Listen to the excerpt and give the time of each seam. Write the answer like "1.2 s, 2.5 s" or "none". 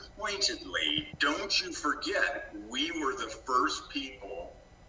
1.1 s